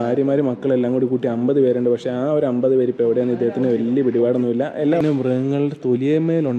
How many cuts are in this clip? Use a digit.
1